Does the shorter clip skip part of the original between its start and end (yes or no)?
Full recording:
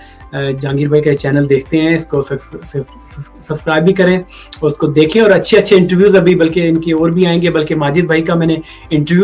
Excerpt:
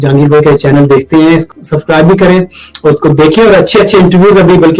yes